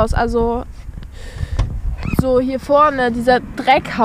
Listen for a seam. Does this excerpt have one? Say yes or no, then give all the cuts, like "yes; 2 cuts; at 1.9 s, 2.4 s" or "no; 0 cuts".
no; 0 cuts